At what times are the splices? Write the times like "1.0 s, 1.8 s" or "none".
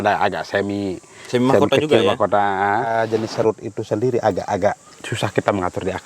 2.9 s